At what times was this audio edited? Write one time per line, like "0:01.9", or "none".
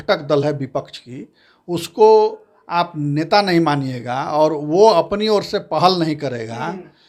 none